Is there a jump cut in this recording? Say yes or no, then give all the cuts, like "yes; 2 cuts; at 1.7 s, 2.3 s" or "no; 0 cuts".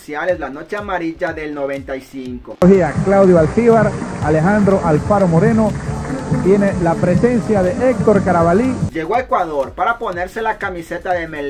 yes; 2 cuts; at 2.4 s, 8.9 s